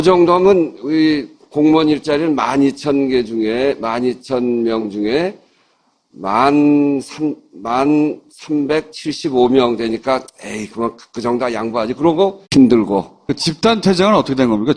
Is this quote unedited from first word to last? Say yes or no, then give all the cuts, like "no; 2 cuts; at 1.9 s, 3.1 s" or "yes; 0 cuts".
yes; 0 cuts